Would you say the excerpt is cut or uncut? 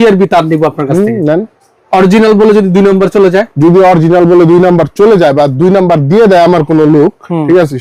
uncut